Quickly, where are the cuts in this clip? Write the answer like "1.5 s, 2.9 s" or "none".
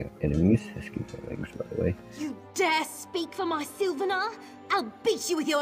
2.2 s